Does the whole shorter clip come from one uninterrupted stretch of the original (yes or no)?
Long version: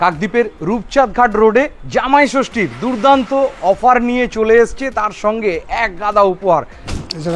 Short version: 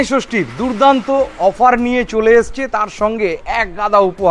yes